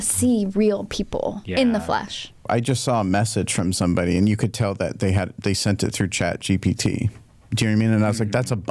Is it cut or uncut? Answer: cut